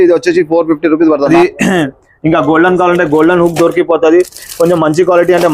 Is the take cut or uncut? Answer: cut